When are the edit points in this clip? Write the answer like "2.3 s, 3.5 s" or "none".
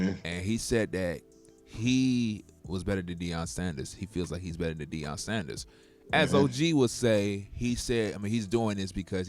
none

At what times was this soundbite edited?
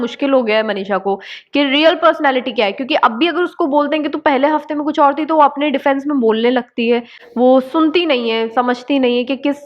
none

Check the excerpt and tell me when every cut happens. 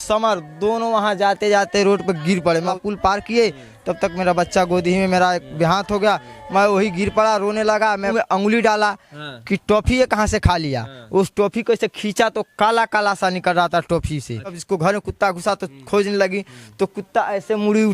2.7 s, 8.1 s, 14.6 s

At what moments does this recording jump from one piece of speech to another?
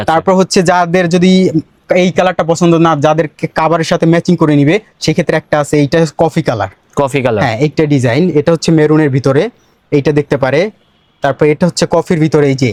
none

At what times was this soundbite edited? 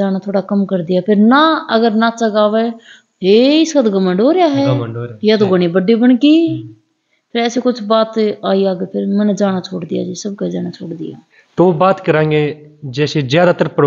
none

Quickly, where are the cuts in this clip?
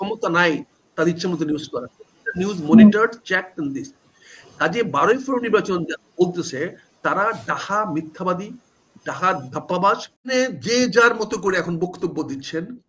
10.3 s

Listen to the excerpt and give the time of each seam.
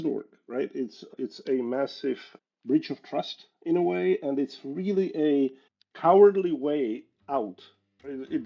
1.1 s, 2.3 s

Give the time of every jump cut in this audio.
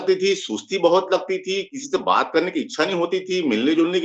none

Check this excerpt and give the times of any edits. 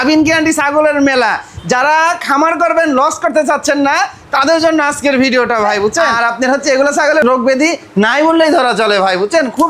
6.1 s, 7.2 s

